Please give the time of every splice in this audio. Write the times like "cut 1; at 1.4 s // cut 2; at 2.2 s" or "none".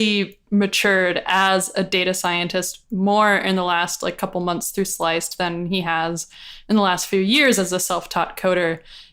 none